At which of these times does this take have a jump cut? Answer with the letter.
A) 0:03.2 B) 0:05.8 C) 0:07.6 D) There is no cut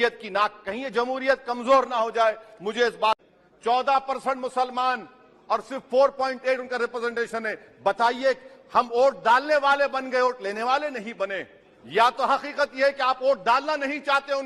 A